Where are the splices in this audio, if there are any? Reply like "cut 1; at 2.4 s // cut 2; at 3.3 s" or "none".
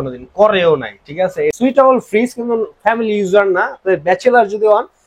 cut 1; at 1.5 s

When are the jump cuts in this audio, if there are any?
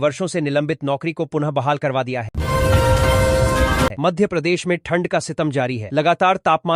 cut 1; at 2.3 s // cut 2; at 3.9 s

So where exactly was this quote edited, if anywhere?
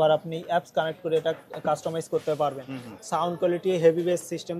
none

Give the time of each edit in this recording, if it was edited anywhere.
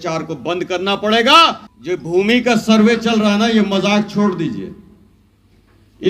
cut 1; at 1.6 s

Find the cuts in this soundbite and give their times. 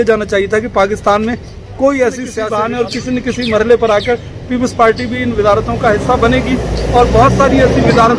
cut 1; at 2.4 s

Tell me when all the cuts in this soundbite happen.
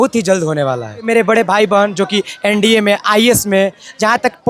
cut 1; at 1.1 s

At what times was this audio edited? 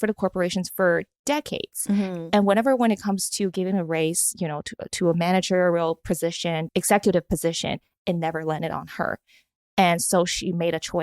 cut 1; at 6.6 s

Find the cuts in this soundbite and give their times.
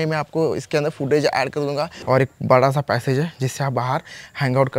cut 1; at 2.0 s

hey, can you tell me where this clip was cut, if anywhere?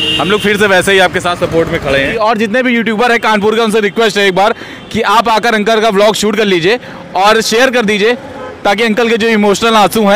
cut 1; at 2.1 s

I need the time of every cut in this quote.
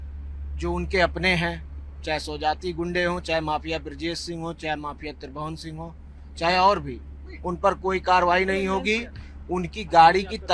none

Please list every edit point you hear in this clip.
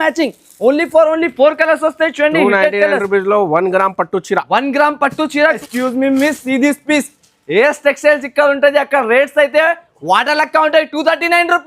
cut 1; at 5.6 s

